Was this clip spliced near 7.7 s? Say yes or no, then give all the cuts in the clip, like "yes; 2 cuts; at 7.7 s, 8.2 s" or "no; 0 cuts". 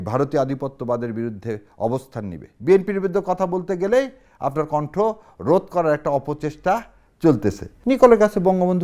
yes; 2 cuts; at 2.5 s, 7.7 s